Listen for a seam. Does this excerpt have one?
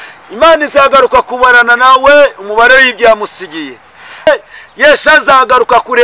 yes; 1 cut; at 4.3 s

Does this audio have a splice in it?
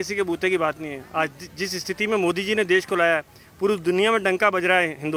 no; 0 cuts

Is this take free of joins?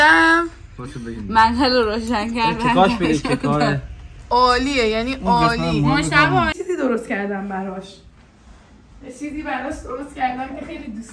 no; 1 cut; at 6.6 s

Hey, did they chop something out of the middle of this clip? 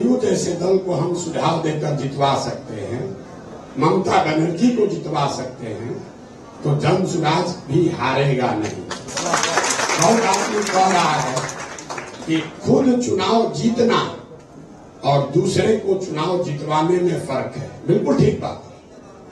no; 0 cuts

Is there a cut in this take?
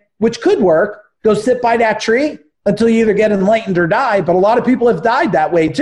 no; 0 cuts

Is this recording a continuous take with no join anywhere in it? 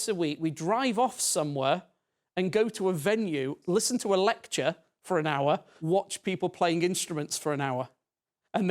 no; 2 cuts; at 3.6 s, 5.7 s

